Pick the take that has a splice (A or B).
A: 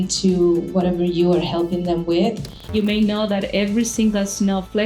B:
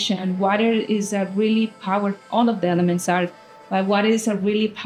A